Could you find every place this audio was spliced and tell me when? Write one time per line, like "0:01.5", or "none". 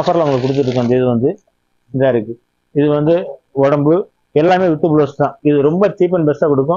0:05.4